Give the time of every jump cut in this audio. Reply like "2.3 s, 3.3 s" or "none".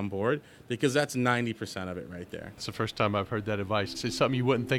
2.7 s, 4.0 s